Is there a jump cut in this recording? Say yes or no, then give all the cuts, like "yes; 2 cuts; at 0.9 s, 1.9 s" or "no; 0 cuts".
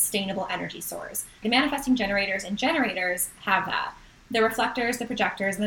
yes; 1 cut; at 1.4 s